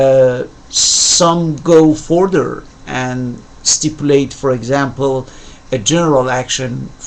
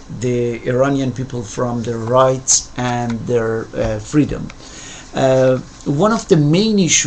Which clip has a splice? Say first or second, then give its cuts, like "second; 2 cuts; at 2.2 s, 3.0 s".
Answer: second; 1 cut; at 1.2 s